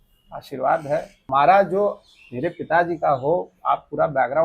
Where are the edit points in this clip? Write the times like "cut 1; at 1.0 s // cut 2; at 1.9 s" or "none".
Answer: cut 1; at 1.2 s